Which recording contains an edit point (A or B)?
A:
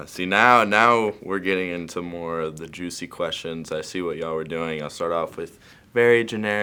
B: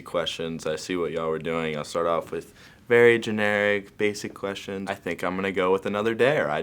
B